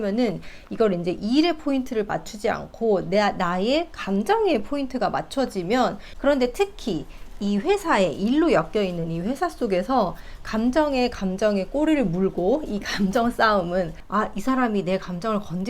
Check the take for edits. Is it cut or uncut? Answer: cut